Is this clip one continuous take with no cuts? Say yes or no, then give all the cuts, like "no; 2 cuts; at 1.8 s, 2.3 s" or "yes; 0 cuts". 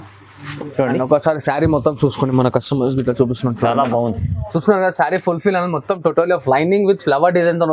yes; 0 cuts